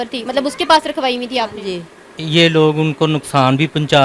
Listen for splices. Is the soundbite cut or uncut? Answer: cut